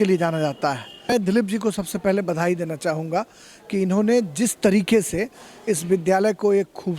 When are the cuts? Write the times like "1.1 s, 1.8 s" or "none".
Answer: 1.1 s